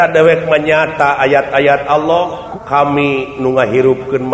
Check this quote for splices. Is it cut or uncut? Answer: cut